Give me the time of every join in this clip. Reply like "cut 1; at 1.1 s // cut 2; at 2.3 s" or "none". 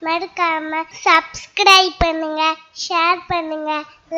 cut 1; at 0.9 s